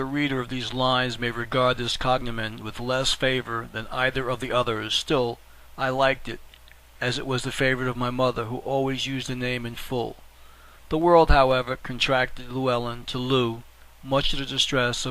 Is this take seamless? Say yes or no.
no